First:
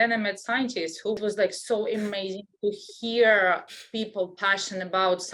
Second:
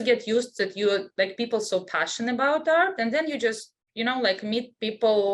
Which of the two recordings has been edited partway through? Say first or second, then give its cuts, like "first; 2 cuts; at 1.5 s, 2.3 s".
first; 1 cut; at 1.2 s